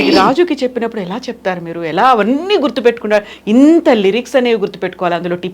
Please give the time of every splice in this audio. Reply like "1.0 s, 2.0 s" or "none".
none

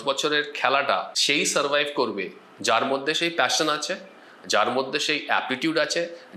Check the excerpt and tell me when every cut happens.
1.2 s

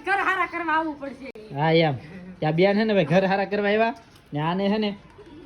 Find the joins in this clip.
none

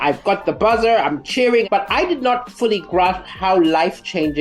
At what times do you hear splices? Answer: 1.7 s

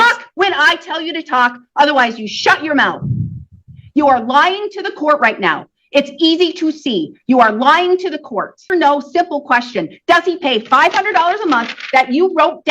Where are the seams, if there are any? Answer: 8.6 s

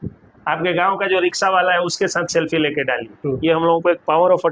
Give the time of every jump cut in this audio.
3.1 s

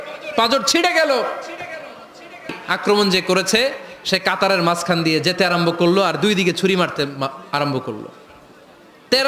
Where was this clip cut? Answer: 2.6 s

